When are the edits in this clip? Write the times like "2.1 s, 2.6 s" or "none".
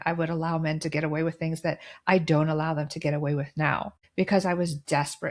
4.0 s

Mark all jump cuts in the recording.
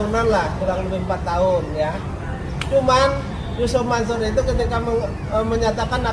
none

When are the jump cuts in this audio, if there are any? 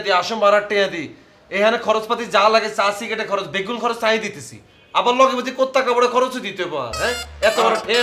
none

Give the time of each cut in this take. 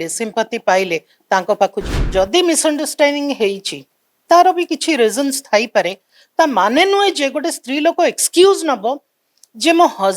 1.9 s

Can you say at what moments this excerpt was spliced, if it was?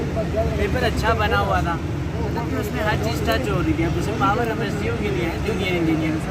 none

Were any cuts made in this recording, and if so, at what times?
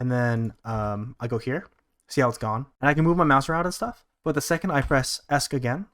2.7 s

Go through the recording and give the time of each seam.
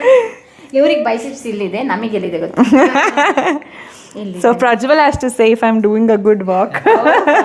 none

